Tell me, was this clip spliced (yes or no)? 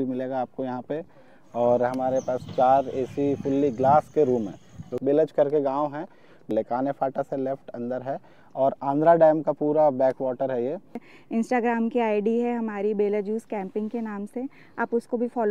yes